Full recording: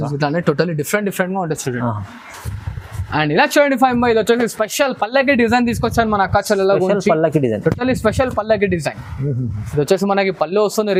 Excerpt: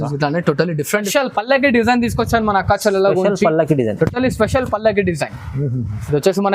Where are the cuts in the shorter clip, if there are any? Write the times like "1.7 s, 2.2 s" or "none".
1.1 s

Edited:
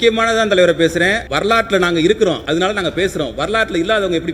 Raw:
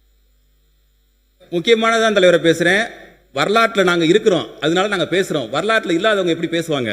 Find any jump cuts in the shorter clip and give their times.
1.3 s, 2.4 s

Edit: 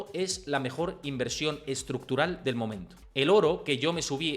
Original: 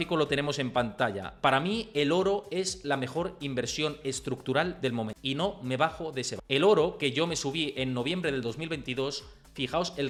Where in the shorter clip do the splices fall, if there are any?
2.9 s

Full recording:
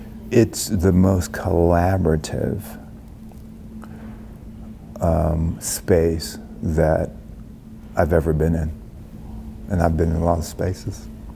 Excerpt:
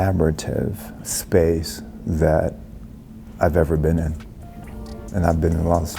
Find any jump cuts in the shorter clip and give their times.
1.1 s

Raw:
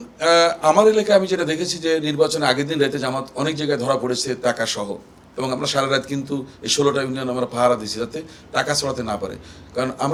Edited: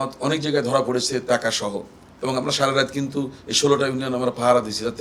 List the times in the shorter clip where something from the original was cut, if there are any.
none

